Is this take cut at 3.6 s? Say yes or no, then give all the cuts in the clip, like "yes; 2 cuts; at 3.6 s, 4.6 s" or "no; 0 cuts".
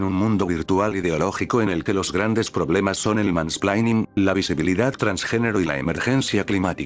yes; 1 cut; at 3.6 s